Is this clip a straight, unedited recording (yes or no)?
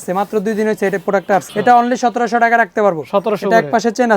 yes